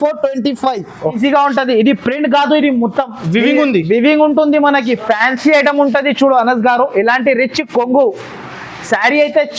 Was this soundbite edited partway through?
yes; 1 cut; at 1.2 s

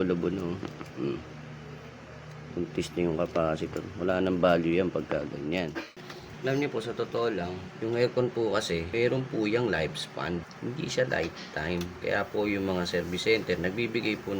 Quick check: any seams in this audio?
yes; 4 cuts; at 5.8 s, 7.6 s, 8.9 s, 10.5 s

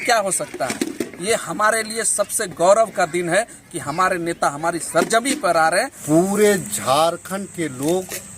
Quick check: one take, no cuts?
no; 1 cut; at 6.0 s

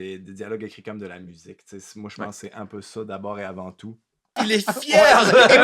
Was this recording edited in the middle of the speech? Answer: yes; 1 cut; at 4.4 s

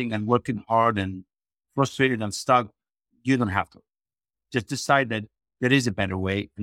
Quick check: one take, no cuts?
yes; 0 cuts

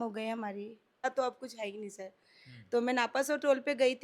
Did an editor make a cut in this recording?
yes; 1 cut; at 1.0 s

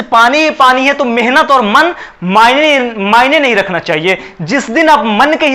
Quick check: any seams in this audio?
no; 0 cuts

